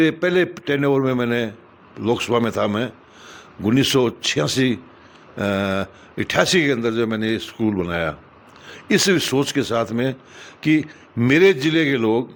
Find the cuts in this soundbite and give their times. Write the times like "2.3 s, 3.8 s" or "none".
none